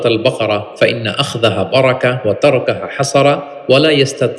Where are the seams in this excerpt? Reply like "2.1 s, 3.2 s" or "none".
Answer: none